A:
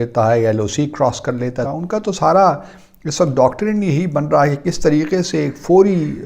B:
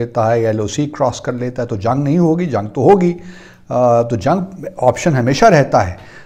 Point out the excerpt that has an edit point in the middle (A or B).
A